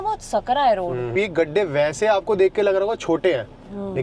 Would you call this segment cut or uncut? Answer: cut